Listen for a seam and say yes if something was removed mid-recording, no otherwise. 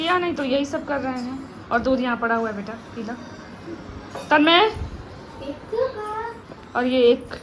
no